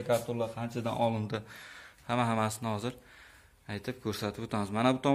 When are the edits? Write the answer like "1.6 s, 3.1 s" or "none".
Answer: none